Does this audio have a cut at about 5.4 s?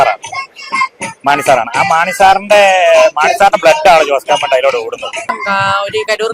yes; 1 cut; at 5.4 s

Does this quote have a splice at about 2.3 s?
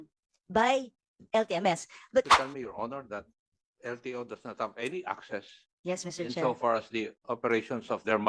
yes; 1 cut; at 2.3 s

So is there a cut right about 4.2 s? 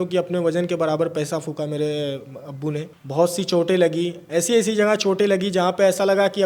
no; 1 cut; at 2.9 s

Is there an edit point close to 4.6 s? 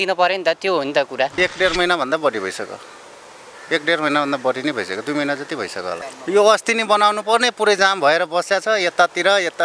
no; 2 cuts; at 1.3 s, 6.1 s

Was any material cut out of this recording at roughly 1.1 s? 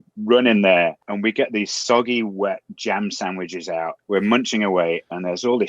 yes; 2 cuts; at 1.1 s, 4.0 s

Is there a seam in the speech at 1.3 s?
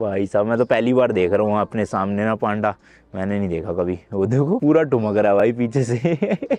no; 0 cuts

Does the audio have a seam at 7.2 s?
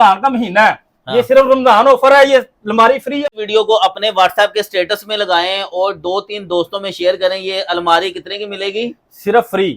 no; 1 cut; at 3.2 s

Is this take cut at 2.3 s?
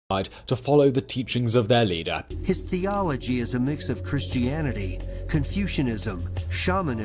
yes; 1 cut; at 2.3 s

